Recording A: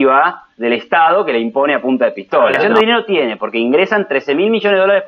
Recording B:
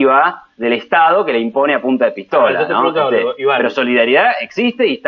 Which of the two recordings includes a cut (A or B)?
A